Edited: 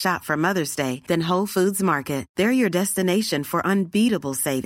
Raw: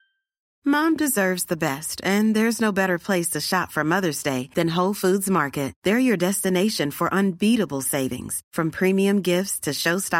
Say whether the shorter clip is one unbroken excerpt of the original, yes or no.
yes